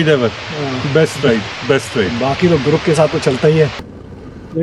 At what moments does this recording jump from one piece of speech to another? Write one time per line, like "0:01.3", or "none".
0:03.7